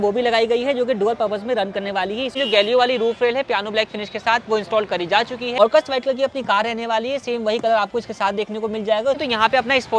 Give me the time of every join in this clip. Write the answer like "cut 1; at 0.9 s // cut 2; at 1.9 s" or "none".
cut 1; at 2.3 s // cut 2; at 5.6 s // cut 3; at 9.2 s